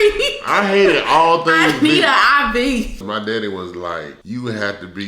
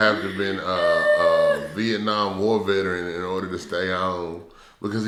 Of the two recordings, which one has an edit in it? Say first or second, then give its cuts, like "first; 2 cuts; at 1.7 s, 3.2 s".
first; 2 cuts; at 3.1 s, 4.2 s